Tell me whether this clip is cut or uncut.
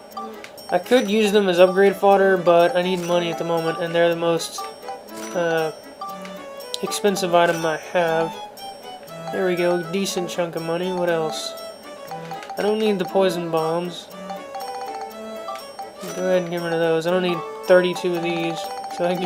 uncut